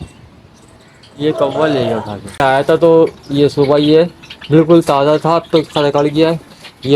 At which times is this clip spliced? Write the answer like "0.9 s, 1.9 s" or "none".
2.4 s